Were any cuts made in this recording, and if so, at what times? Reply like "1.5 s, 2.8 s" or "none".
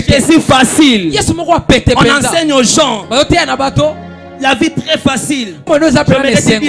5.6 s